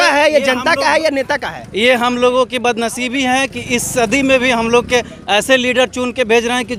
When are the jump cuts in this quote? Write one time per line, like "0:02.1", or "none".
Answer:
none